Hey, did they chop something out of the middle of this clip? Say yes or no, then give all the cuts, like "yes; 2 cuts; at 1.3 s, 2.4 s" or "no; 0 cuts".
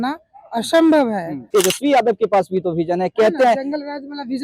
yes; 1 cut; at 1.5 s